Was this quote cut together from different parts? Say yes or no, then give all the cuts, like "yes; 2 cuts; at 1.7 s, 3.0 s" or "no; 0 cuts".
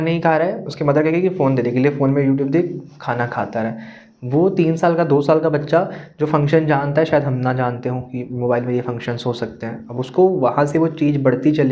no; 0 cuts